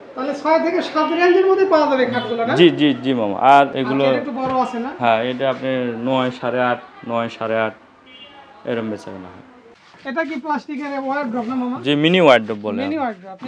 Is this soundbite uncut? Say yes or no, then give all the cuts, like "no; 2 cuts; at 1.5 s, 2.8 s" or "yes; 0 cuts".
no; 2 cuts; at 3.8 s, 9.8 s